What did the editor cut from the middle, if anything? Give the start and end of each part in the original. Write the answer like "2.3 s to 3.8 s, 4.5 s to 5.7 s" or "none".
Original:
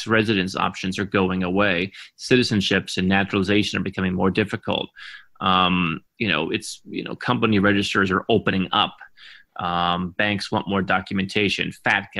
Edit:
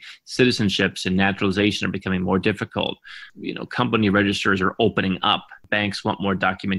5.2 s to 6.8 s, 9.1 s to 10.1 s